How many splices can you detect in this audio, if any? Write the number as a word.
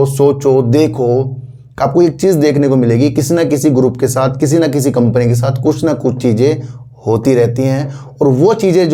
zero